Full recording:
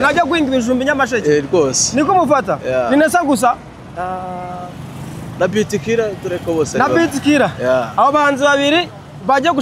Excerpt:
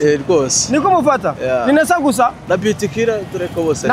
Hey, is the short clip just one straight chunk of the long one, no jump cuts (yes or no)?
no